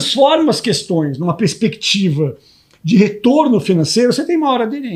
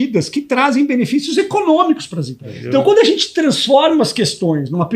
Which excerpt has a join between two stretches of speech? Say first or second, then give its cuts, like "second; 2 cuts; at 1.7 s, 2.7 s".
second; 1 cut; at 2.6 s